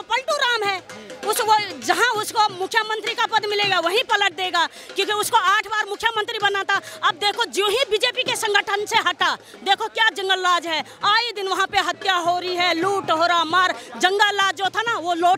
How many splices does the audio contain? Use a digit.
0